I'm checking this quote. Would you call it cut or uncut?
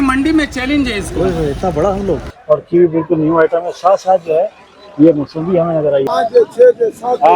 cut